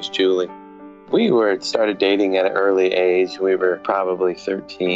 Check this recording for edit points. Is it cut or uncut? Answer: cut